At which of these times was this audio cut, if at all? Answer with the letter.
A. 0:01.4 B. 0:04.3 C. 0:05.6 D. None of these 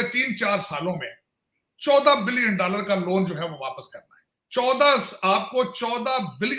D